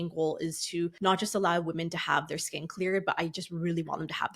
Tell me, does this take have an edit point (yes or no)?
yes